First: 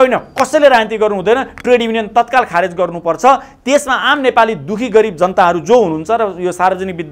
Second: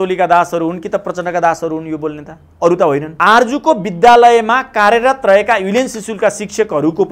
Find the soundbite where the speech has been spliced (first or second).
second